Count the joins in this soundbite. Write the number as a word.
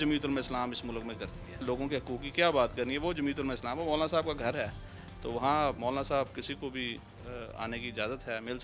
one